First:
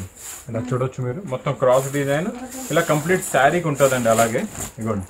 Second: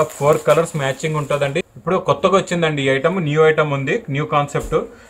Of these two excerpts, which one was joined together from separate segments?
second; 1 cut; at 1.6 s

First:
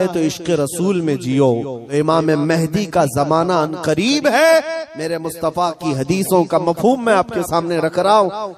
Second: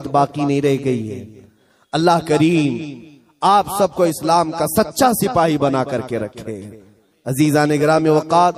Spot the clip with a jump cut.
first; 1 cut; at 1.8 s

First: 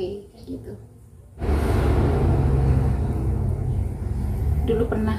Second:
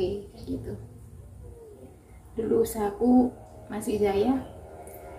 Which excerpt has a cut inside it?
first; 1 cut; at 1.7 s

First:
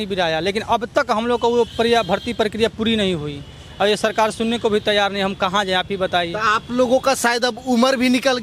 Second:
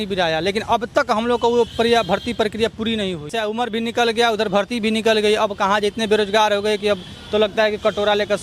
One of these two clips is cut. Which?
second; 1 cut; at 3.3 s

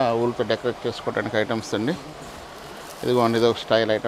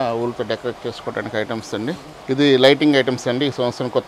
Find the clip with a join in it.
second; 1 cut; at 2.1 s

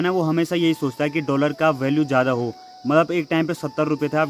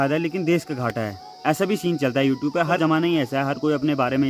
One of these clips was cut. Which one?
second; 1 cut; at 2.8 s

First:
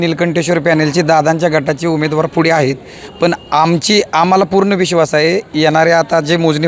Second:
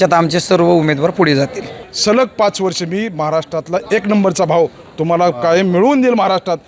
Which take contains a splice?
second; 1 cut; at 1.8 s

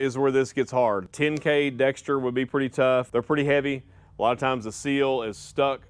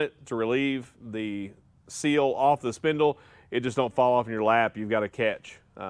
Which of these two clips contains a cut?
first; 2 cuts; at 1.1 s, 3.1 s

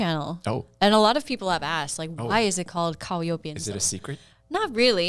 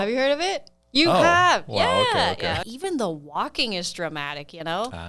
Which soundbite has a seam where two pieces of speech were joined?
second; 1 cut; at 2.7 s

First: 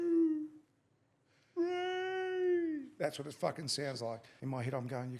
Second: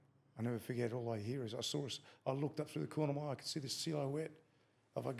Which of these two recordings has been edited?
first; 1 cut; at 4.3 s

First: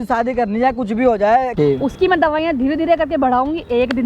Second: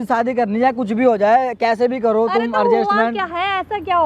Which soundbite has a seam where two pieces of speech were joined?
first; 1 cut; at 1.5 s

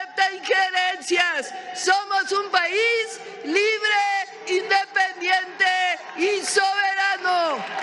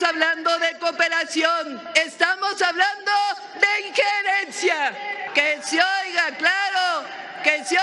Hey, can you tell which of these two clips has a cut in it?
second; 2 cuts; at 1.8 s, 5.3 s

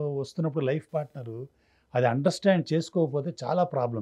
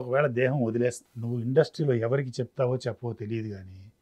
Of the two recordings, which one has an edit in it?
second; 1 cut; at 1.1 s

